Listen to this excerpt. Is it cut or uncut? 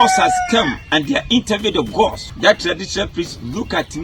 cut